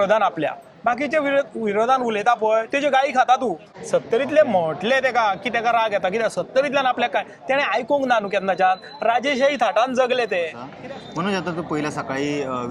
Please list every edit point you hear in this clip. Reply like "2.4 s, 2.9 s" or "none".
3.7 s, 10.6 s